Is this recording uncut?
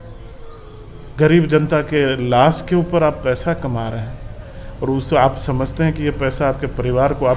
yes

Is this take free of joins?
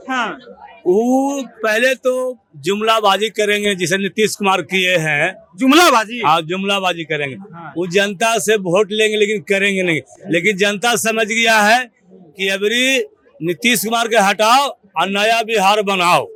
yes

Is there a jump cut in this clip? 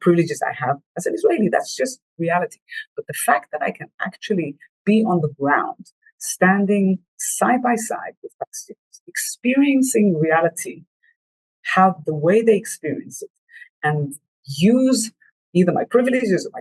no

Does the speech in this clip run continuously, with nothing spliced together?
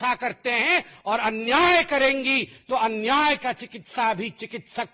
yes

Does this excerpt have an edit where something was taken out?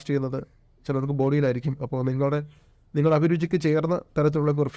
no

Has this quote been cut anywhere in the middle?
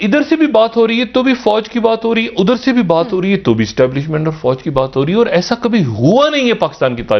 no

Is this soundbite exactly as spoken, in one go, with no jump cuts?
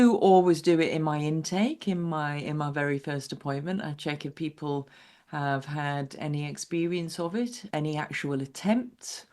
no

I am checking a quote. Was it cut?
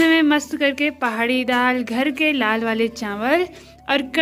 no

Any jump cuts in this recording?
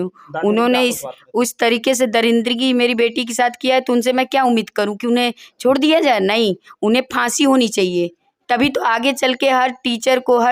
no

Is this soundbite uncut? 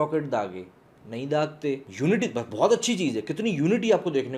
no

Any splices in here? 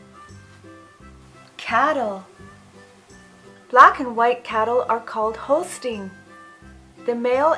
no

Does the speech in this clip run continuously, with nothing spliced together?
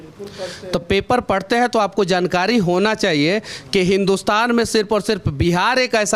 yes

